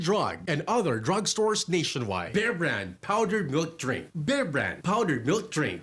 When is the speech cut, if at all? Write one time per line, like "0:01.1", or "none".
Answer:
0:02.3